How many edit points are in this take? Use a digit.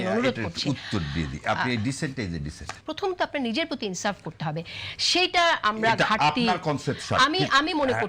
1